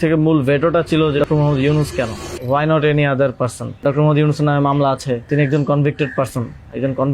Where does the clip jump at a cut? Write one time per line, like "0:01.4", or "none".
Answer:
0:01.2
0:02.3
0:03.8
0:05.3